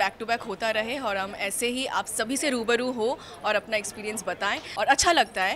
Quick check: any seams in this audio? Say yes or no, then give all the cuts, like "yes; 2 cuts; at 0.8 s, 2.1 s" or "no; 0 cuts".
no; 0 cuts